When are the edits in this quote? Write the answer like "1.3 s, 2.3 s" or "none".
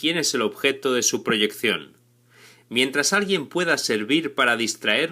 2.5 s